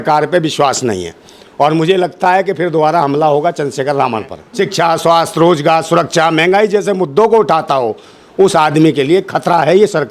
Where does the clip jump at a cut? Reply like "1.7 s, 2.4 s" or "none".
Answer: 4.4 s